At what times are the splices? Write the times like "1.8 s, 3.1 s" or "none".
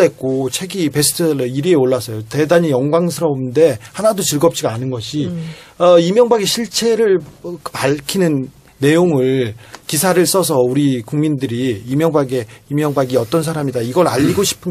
11.5 s